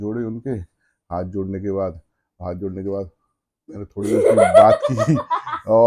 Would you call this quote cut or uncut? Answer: uncut